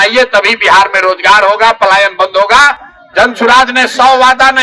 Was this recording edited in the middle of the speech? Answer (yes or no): no